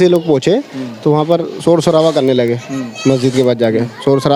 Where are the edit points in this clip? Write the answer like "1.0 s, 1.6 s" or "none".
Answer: none